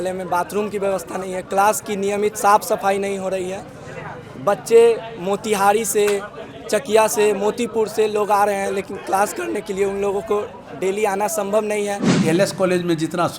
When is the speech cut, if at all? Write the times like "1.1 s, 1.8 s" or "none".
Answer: 12.1 s